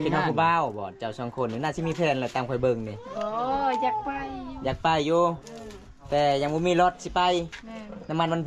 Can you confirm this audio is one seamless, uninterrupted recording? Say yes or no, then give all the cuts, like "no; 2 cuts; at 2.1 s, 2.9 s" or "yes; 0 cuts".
yes; 0 cuts